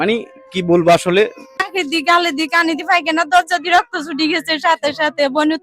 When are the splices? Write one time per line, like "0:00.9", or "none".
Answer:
0:01.7